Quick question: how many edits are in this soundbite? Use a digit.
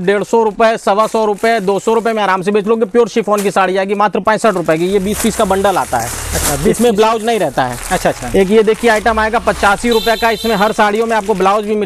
0